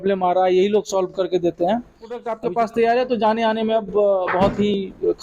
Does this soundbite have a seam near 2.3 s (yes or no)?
yes